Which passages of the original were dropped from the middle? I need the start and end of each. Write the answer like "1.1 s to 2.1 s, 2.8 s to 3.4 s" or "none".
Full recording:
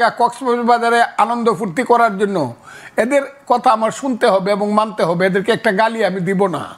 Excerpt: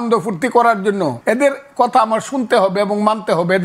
2.5 s to 2.9 s